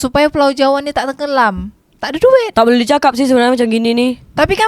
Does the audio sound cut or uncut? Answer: cut